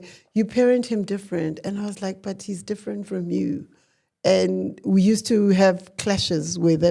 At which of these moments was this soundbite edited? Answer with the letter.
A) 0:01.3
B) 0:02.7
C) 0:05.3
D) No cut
D